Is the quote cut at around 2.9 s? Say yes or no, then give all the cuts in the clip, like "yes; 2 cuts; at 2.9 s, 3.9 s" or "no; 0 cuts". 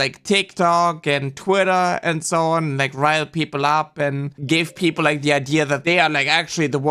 no; 2 cuts; at 4.4 s, 5.8 s